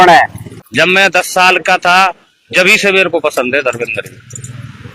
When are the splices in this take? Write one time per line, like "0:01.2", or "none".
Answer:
0:00.9